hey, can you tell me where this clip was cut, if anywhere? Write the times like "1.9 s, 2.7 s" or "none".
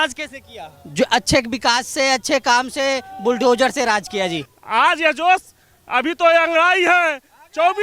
4.5 s